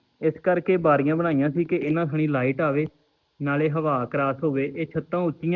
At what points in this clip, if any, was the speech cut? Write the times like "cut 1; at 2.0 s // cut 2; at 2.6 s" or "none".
none